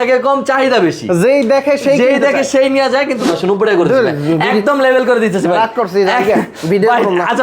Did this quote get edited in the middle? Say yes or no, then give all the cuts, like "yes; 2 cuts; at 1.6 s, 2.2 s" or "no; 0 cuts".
yes; 1 cut; at 3.2 s